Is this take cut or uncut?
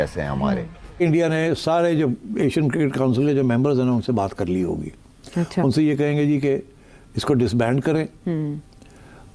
cut